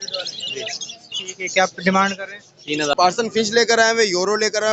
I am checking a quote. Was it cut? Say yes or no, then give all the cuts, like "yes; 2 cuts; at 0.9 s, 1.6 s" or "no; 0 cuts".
yes; 1 cut; at 2.9 s